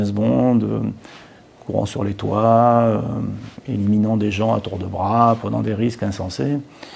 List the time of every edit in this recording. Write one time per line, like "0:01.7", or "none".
none